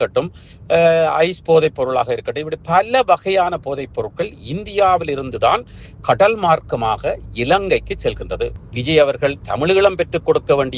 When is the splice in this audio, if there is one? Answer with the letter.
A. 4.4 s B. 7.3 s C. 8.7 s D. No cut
C